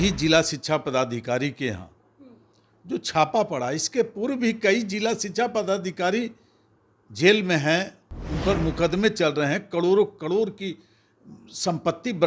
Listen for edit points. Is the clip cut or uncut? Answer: uncut